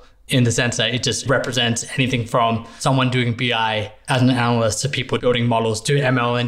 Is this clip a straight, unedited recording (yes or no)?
no